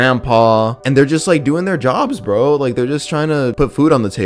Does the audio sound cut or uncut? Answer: uncut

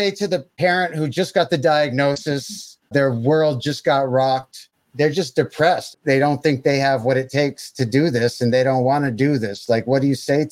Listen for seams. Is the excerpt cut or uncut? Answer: cut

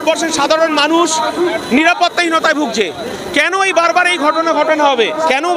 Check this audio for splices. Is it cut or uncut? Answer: uncut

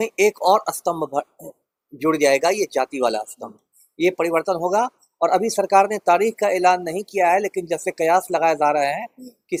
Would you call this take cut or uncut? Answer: uncut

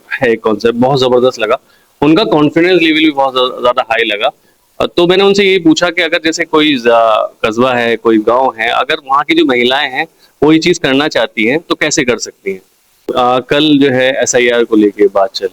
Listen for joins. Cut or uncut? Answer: cut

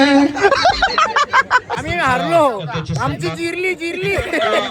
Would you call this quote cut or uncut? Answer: cut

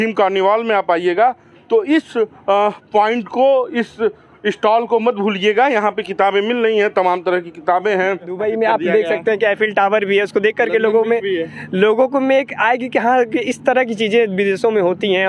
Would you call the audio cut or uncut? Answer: cut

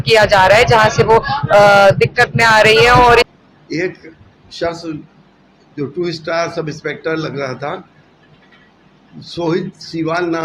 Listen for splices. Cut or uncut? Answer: cut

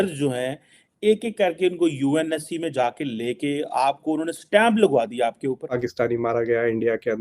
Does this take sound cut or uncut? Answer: cut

